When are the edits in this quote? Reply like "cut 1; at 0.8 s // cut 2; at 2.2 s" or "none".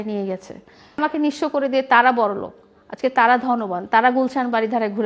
cut 1; at 1.0 s